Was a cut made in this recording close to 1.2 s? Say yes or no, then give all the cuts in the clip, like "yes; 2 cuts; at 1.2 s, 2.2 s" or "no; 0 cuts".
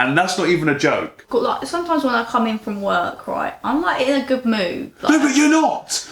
yes; 1 cut; at 1.2 s